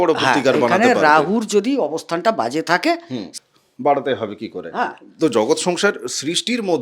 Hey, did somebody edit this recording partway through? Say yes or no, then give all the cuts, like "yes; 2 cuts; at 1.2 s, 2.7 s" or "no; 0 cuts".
yes; 1 cut; at 3.3 s